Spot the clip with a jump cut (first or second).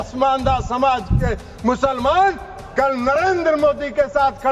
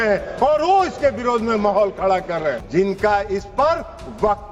second